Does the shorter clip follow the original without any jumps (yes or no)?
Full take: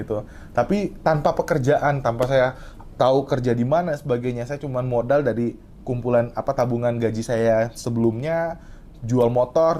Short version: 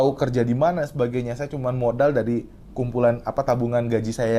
yes